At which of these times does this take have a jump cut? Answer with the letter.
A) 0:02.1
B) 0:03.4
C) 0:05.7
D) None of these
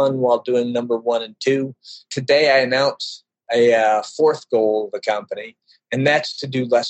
A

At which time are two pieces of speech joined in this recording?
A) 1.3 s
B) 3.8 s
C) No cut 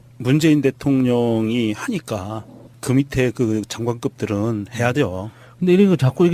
C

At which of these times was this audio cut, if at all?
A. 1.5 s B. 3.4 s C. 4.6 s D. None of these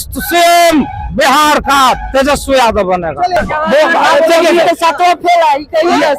B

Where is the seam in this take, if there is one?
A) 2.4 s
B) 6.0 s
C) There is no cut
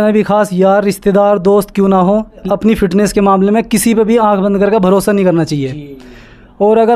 A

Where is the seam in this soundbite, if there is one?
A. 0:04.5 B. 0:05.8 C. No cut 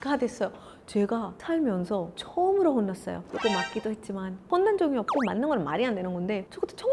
A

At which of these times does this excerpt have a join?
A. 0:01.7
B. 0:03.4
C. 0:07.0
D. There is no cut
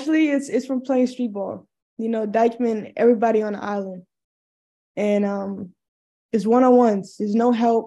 D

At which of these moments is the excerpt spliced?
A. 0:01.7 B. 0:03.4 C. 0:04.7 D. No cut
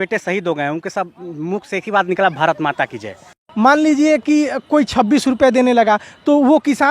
B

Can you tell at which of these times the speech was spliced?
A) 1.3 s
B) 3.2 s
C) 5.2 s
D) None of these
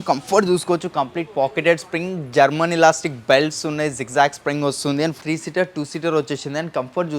C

